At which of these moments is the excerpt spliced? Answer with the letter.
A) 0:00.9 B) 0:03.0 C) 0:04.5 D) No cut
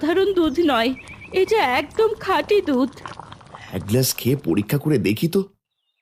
D